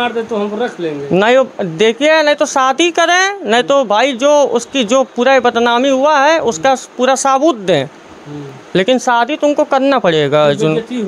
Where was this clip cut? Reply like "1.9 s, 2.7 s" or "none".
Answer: none